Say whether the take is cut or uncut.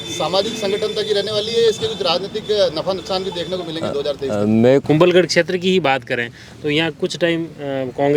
cut